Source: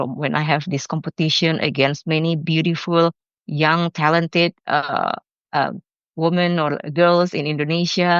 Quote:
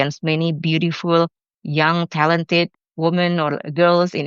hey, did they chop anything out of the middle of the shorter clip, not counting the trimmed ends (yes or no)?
yes